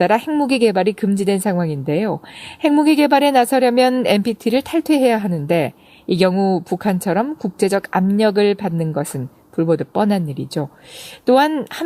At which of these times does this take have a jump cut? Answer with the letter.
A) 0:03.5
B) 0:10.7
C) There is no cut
A